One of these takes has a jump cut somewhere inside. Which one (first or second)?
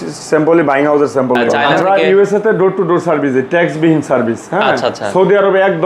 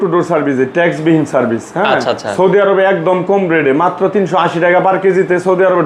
first